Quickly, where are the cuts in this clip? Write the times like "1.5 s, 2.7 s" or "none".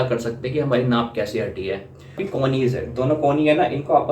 2.2 s

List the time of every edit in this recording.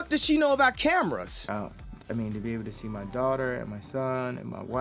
1.3 s

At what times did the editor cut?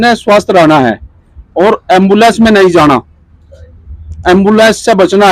none

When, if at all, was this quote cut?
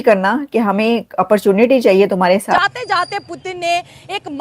2.5 s

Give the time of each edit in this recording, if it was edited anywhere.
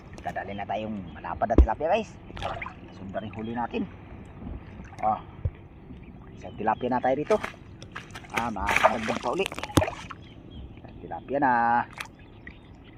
none

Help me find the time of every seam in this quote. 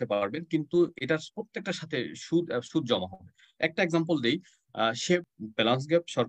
5.2 s

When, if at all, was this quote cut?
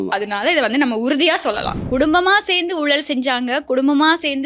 1.7 s

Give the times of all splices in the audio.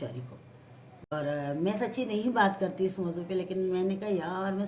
1.1 s

